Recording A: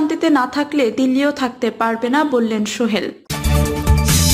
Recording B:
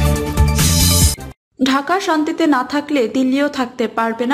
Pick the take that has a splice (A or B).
A